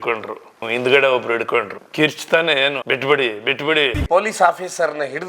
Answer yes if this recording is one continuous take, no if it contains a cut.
no